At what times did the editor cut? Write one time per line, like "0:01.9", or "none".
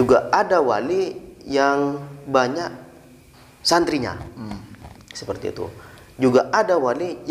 none